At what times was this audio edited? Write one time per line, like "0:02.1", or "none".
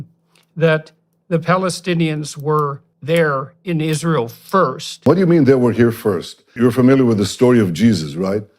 0:02.9
0:05.1
0:06.4

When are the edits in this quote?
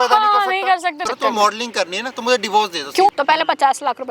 0:01.0
0:03.1

